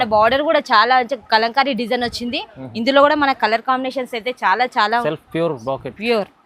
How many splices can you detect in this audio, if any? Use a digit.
1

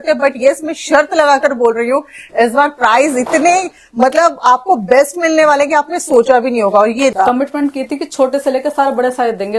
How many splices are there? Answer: 1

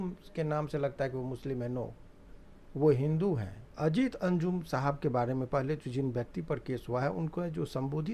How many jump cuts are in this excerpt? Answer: 1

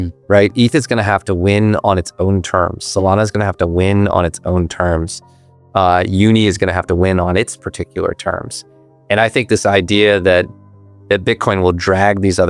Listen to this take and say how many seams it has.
0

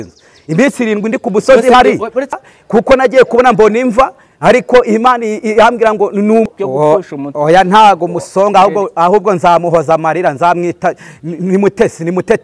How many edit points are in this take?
2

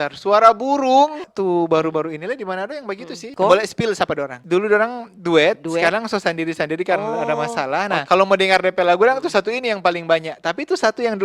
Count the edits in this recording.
4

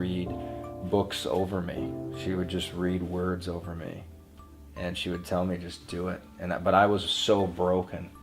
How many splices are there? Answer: 0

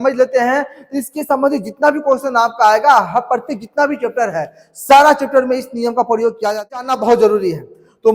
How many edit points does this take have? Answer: 1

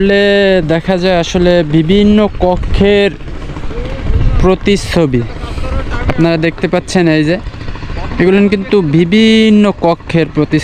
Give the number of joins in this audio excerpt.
0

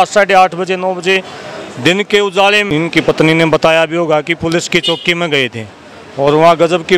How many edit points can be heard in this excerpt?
1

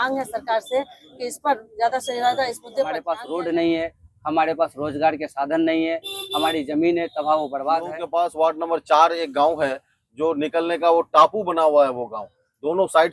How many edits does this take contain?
2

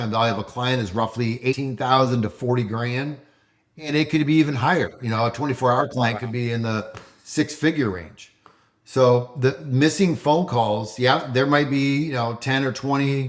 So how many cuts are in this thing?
1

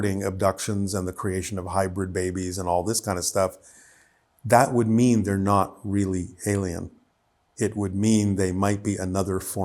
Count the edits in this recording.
0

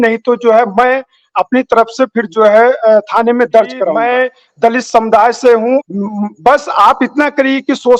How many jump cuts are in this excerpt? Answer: 2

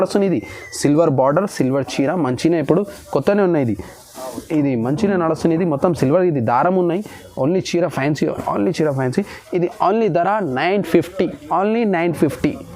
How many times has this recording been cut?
0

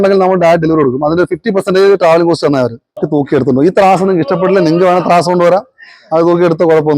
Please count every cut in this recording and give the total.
1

